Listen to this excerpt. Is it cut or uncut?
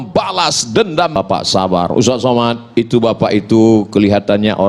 cut